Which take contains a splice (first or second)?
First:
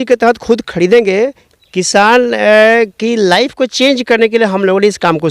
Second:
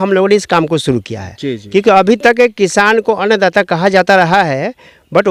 first